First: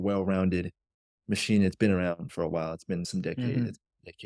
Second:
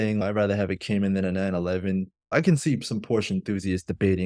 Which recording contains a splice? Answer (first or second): second